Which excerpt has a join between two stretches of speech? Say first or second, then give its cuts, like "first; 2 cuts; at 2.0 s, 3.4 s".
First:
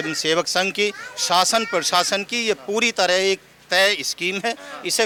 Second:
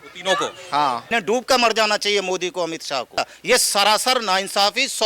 second; 2 cuts; at 1.0 s, 3.3 s